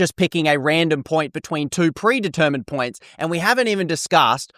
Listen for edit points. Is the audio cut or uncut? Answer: uncut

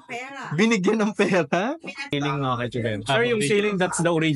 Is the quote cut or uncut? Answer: cut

